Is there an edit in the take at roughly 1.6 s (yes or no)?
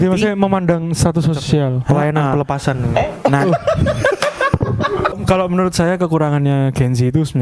no